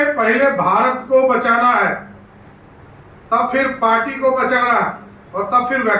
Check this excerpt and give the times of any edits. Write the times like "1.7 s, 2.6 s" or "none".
none